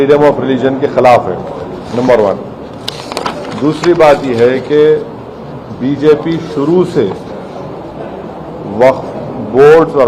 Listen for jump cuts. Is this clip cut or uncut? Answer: uncut